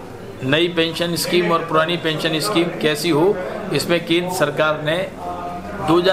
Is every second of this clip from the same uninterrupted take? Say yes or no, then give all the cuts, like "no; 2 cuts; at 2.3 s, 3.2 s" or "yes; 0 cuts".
yes; 0 cuts